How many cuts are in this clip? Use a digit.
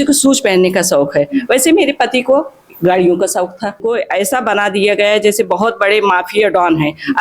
1